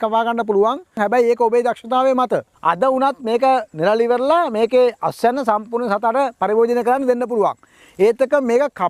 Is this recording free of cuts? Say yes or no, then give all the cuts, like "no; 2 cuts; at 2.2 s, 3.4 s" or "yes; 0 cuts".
no; 2 cuts; at 1.0 s, 2.5 s